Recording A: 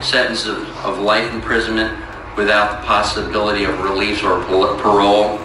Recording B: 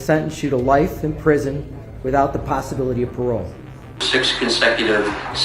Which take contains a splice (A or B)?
B